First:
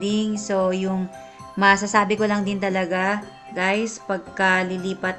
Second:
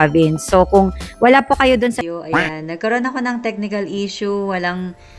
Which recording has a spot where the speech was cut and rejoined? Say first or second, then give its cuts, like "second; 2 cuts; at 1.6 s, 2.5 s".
second; 1 cut; at 1.9 s